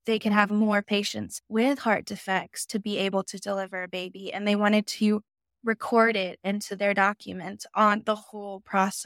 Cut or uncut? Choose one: uncut